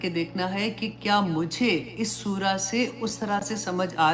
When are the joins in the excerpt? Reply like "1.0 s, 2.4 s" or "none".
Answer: none